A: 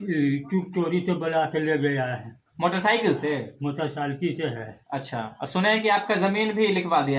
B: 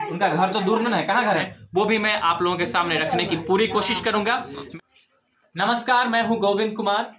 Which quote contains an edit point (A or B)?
B